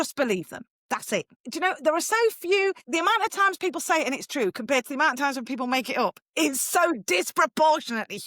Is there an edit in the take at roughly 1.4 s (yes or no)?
yes